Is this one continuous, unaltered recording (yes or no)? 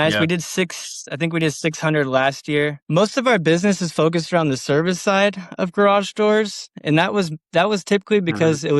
no